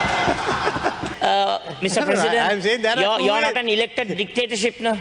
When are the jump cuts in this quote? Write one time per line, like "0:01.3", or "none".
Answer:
0:01.1

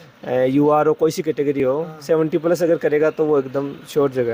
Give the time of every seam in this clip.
none

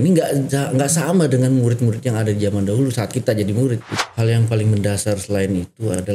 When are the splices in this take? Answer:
0:03.9

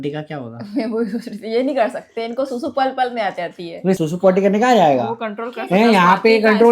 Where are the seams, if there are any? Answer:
0:04.0

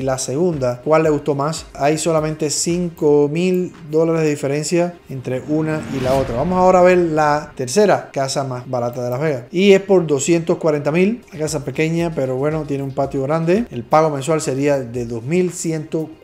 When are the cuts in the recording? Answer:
0:01.7
0:11.3
0:13.8

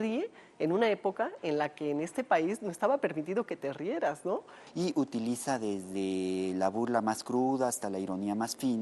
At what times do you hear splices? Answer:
0:04.6

